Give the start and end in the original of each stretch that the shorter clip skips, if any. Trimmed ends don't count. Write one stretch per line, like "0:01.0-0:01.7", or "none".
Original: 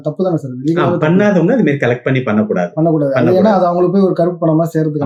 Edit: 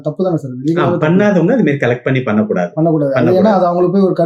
none